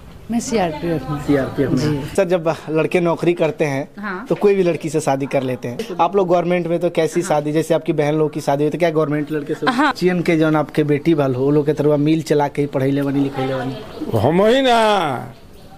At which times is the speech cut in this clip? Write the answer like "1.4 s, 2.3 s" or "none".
2.1 s, 5.8 s, 9.9 s

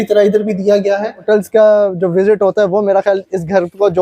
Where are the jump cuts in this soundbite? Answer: 1.2 s

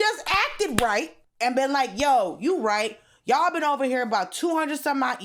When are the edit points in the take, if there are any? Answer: 1.2 s

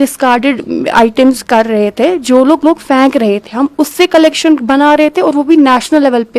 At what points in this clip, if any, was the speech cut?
none

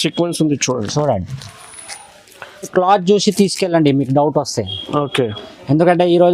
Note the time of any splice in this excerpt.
2.7 s

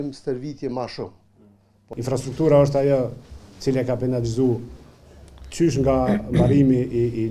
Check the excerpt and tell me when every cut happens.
1.9 s

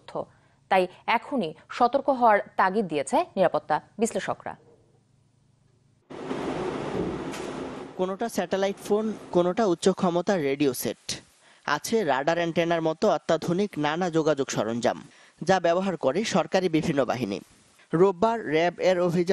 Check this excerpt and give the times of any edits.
7.8 s

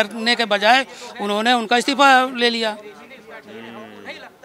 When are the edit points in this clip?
none

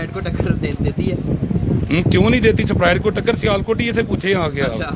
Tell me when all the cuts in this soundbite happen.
none

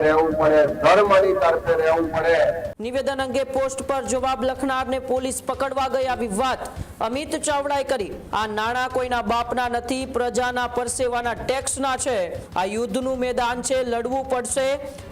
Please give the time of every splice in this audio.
2.8 s, 8.2 s, 12.4 s

